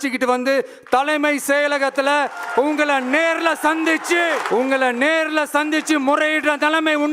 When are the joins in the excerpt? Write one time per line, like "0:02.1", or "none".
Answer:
0:04.4